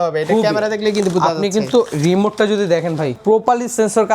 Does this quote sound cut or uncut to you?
cut